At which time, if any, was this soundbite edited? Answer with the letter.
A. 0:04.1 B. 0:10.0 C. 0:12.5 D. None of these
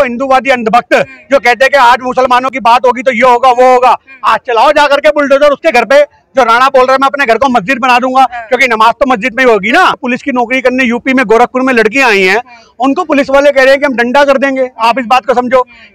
B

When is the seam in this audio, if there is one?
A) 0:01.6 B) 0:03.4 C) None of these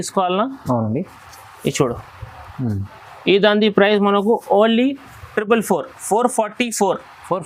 C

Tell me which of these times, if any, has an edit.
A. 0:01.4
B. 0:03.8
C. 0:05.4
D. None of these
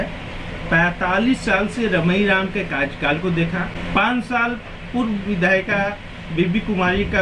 B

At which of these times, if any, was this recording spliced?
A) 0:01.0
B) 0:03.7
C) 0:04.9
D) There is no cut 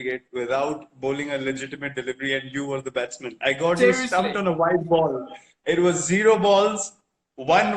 D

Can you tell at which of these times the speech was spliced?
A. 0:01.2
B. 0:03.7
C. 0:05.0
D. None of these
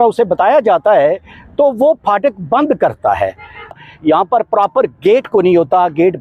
B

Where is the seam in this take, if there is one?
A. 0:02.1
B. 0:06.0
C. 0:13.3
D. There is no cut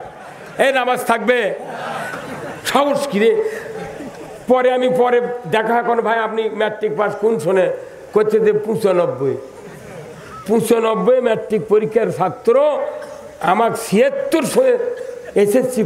A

